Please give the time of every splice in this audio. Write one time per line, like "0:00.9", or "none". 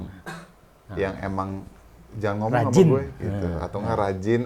none